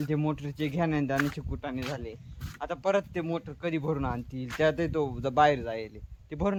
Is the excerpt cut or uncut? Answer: uncut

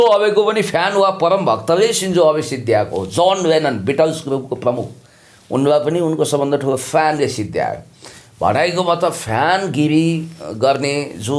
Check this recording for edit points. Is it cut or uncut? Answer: uncut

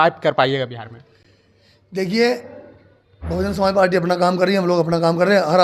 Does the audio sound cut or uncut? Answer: uncut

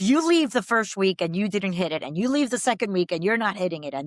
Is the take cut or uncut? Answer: uncut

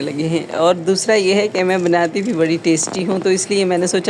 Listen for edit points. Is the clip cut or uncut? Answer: uncut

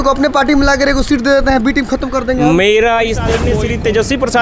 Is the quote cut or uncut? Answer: cut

